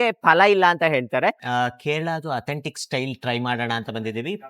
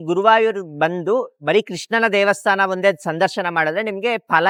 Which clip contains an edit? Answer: first; 1 cut; at 1.4 s

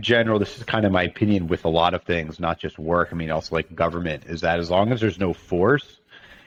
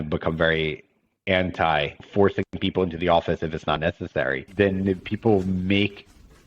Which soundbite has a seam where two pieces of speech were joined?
second; 2 cuts; at 2.0 s, 4.4 s

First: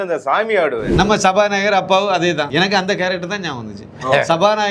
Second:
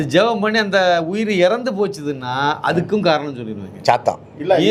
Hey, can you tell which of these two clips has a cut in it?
first; 2 cuts; at 0.8 s, 2.5 s

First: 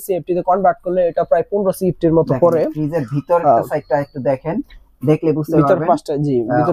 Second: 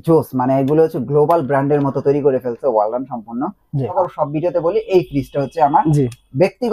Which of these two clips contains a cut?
second; 1 cut; at 3.9 s

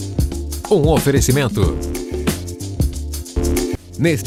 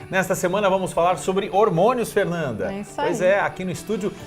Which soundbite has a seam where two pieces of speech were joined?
second; 1 cut; at 2.0 s

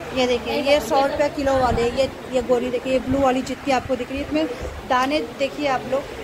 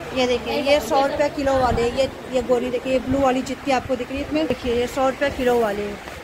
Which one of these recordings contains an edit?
second; 1 cut; at 4.5 s

